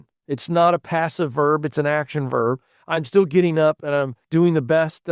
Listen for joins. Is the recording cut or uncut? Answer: cut